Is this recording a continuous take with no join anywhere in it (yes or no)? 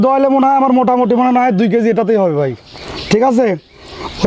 yes